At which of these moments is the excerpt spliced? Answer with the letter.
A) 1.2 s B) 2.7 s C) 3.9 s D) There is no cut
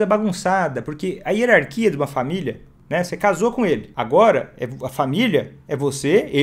C